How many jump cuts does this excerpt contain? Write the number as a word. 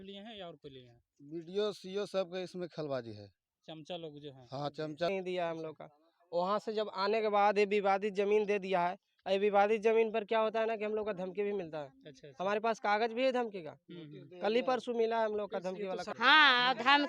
two